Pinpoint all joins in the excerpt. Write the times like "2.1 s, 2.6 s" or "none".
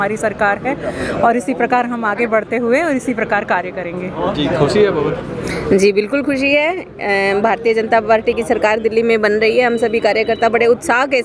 none